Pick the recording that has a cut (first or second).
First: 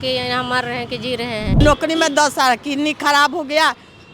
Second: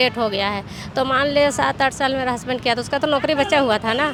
first